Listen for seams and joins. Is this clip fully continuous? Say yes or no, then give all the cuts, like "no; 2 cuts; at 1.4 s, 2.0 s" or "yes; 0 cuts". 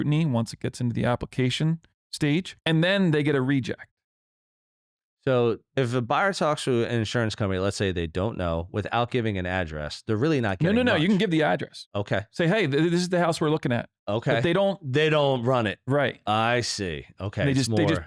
no; 2 cuts; at 2.5 s, 5.7 s